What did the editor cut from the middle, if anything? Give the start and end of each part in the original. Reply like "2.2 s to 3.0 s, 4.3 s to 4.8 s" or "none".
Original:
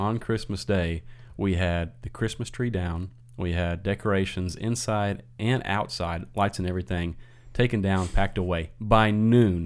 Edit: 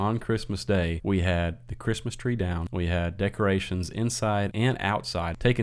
1.0 s to 1.3 s, 3.0 s to 3.3 s, 5.4 s to 6.8 s